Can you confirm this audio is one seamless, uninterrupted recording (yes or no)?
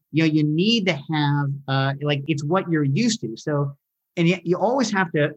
no